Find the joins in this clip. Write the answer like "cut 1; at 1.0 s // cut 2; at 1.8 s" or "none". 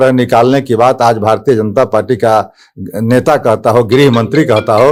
none